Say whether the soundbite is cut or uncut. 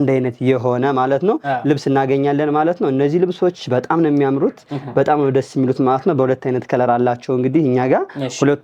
uncut